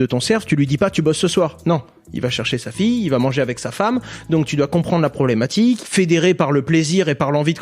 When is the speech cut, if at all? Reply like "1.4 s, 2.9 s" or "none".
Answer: 5.8 s